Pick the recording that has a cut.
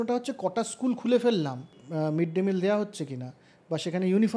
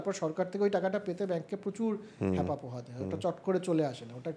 first; 1 cut; at 1.8 s

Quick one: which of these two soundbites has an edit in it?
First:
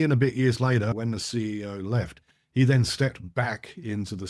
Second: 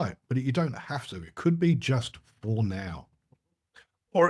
first; 1 cut; at 0.9 s

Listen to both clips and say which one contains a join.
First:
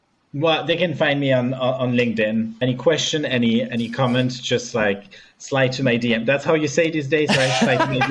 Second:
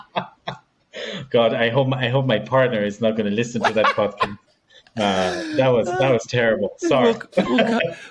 first; 1 cut; at 2.5 s

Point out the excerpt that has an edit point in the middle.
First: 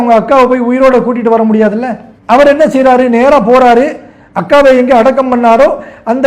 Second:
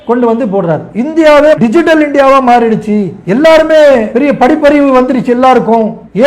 second; 2 cuts; at 0.9 s, 1.6 s

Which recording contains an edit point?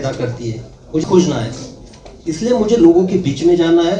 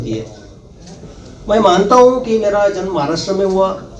first; 1 cut; at 1.1 s

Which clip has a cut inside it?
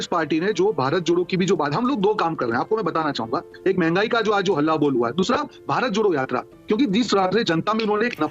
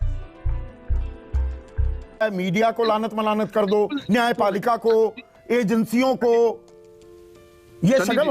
second; 1 cut; at 2.2 s

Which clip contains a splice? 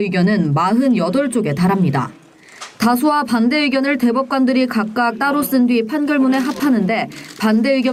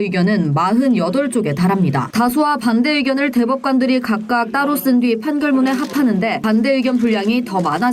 second; 2 cuts; at 2.0 s, 6.4 s

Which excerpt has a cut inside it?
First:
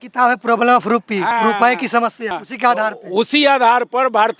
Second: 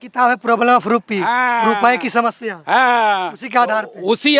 first; 2 cuts; at 1.3 s, 2.4 s

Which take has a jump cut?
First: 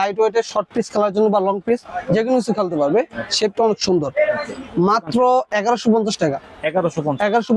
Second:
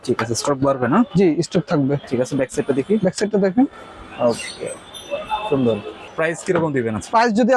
second; 1 cut; at 6.1 s

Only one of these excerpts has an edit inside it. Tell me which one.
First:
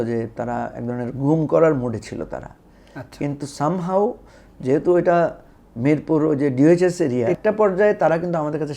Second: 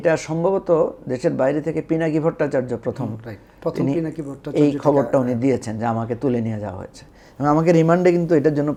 first; 1 cut; at 7.4 s

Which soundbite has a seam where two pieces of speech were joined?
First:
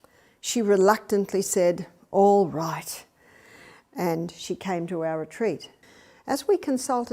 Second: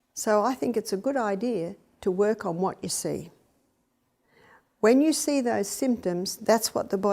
first; 1 cut; at 5.8 s

